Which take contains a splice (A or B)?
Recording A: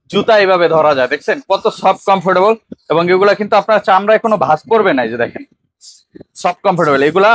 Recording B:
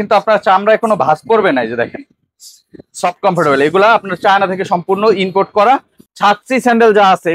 B